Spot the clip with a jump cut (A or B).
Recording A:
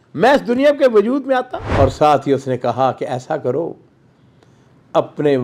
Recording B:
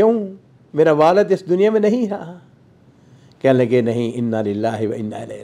A